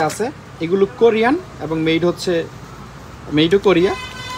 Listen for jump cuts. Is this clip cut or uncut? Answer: uncut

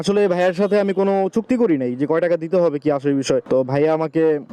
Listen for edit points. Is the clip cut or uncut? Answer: uncut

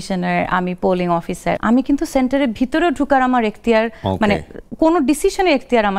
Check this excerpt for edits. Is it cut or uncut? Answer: cut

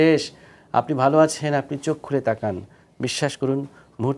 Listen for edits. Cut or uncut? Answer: uncut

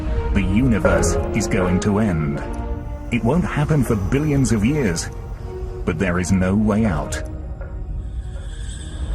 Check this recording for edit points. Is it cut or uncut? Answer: cut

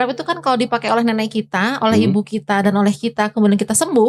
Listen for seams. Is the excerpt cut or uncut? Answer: uncut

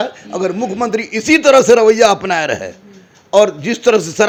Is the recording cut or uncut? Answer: uncut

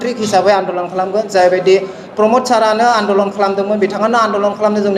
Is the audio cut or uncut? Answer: uncut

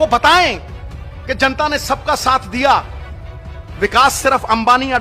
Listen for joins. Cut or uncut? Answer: uncut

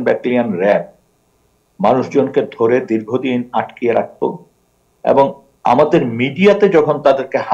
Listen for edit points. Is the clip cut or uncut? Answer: uncut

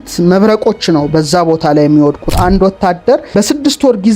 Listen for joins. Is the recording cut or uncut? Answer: cut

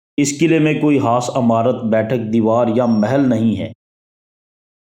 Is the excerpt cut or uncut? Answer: uncut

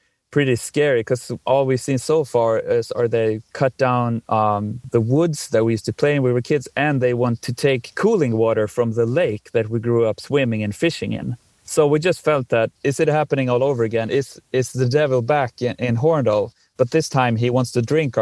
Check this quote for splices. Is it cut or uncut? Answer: cut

